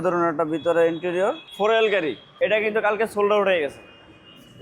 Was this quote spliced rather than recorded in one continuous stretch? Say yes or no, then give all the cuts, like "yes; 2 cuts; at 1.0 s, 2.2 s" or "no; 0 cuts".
yes; 2 cuts; at 1.5 s, 2.3 s